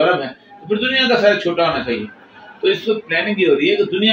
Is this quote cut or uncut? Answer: uncut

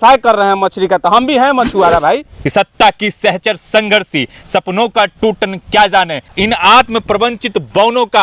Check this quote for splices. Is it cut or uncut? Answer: cut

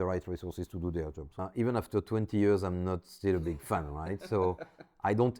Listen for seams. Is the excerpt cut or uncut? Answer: cut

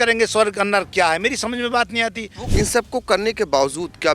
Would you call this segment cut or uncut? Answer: cut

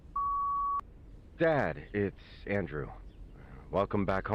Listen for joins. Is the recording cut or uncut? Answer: cut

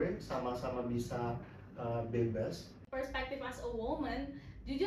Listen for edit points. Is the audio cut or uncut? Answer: cut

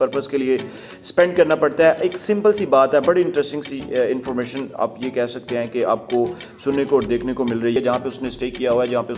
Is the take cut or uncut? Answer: cut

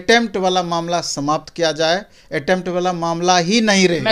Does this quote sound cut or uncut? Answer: uncut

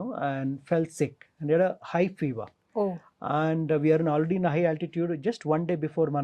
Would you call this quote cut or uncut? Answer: uncut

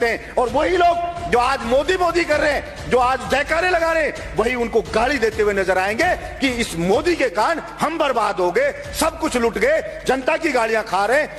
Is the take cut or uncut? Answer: uncut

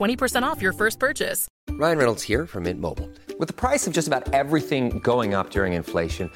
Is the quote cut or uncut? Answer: cut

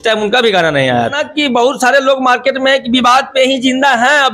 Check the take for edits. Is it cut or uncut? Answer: cut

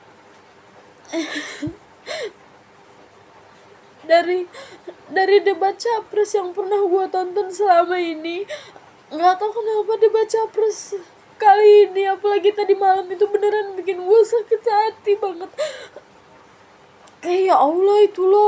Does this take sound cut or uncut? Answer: uncut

